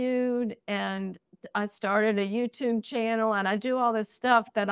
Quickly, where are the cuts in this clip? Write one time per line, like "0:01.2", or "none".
none